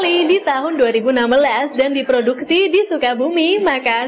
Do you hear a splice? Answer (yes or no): no